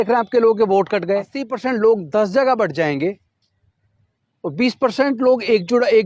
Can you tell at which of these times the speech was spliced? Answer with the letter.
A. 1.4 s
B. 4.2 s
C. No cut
A